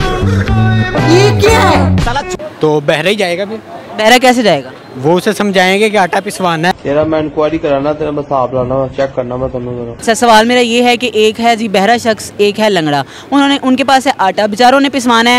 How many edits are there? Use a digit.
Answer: 2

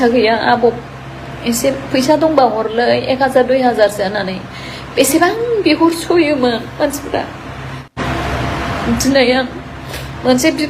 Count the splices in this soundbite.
1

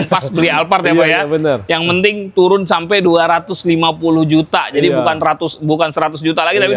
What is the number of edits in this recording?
0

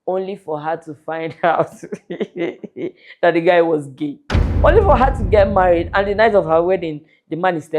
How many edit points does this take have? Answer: 1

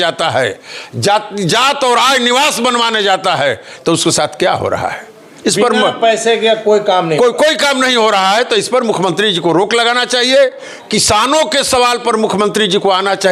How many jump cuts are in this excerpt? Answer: 0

